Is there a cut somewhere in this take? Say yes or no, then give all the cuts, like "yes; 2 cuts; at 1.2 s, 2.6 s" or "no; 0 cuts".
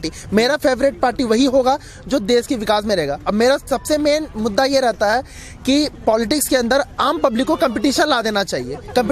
no; 0 cuts